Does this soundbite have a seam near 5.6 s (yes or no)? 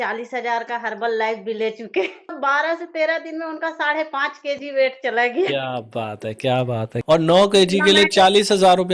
no